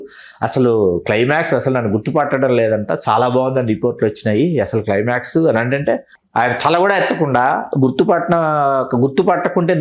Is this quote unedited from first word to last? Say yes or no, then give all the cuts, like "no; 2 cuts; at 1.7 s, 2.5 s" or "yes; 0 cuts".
no; 1 cut; at 6.1 s